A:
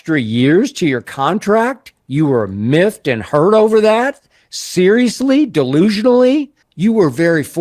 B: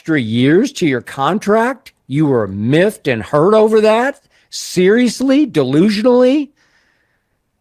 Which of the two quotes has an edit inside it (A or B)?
A